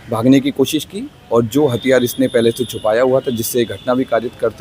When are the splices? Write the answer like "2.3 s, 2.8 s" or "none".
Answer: none